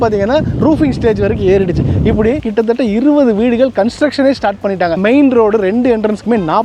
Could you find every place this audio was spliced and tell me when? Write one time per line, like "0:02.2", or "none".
0:02.4
0:05.0